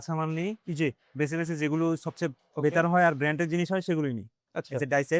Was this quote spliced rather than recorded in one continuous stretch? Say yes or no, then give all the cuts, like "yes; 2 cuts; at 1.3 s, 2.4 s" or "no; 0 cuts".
no; 0 cuts